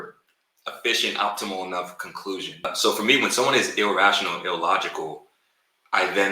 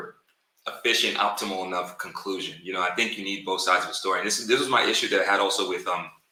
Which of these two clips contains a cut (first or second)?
first